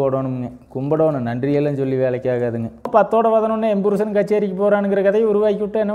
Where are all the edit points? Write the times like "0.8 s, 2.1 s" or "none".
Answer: 2.9 s